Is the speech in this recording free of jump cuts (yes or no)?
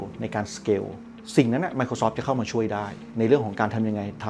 no